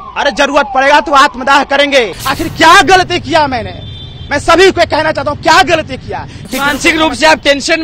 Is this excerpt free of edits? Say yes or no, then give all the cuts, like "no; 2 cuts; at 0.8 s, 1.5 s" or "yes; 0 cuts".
no; 2 cuts; at 2.2 s, 6.5 s